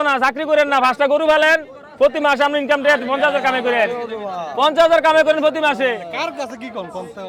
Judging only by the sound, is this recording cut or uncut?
uncut